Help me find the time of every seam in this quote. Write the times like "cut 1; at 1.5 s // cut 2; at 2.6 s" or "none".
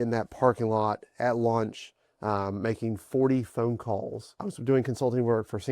cut 1; at 4.4 s